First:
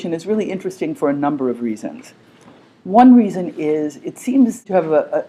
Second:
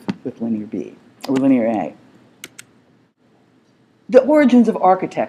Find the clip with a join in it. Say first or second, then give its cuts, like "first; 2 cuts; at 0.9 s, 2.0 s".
first; 1 cut; at 2.8 s